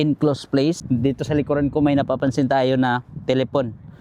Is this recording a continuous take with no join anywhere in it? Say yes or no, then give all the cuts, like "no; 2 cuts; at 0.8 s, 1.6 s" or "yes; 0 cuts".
no; 1 cut; at 0.9 s